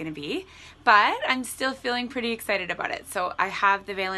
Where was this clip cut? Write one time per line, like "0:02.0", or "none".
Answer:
none